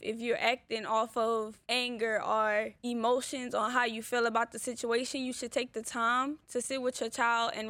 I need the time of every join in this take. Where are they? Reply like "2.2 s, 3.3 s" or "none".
1.6 s, 2.8 s

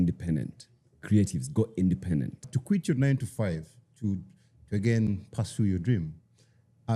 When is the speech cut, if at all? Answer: 2.5 s

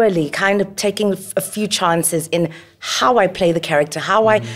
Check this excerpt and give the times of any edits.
none

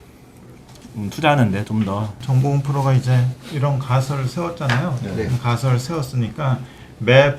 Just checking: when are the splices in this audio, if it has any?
2.2 s

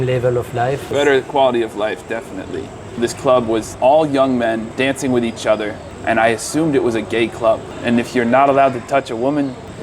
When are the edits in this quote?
0.9 s, 3.0 s, 3.7 s, 4.7 s, 5.9 s, 7.7 s

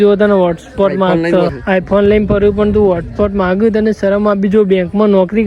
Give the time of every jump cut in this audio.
1.6 s

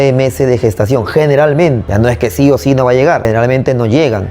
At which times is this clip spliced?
1.8 s, 3.2 s

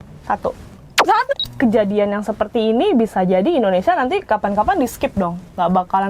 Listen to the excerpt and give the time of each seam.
1.3 s

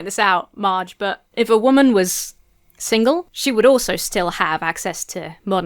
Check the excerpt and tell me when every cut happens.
1.2 s, 3.3 s

